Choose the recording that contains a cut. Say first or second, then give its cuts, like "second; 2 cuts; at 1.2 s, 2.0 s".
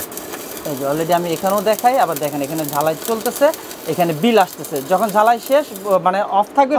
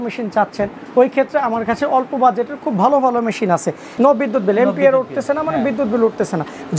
second; 1 cut; at 3.9 s